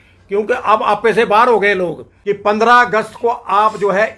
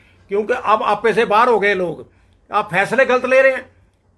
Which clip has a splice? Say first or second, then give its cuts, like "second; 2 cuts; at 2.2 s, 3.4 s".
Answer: first; 1 cut; at 2.1 s